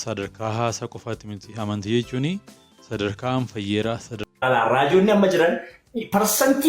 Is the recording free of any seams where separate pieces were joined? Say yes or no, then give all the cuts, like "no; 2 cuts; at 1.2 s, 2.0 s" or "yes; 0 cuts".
no; 1 cut; at 4.1 s